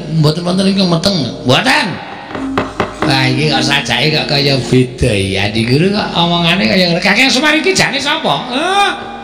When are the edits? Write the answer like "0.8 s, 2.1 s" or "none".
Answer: 2.4 s